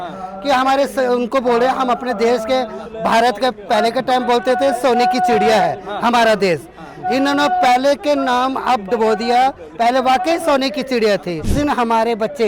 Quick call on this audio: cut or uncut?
cut